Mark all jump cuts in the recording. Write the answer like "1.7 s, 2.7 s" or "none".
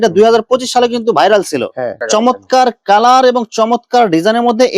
2.0 s